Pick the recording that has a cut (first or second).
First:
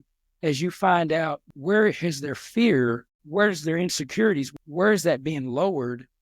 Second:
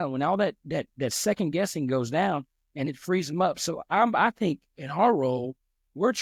first